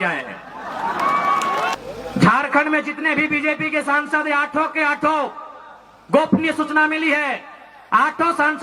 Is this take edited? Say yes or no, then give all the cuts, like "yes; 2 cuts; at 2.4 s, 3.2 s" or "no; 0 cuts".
yes; 1 cut; at 1.8 s